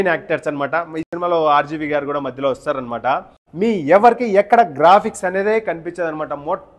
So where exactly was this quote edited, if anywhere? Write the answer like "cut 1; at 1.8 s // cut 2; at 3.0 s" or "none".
cut 1; at 3.4 s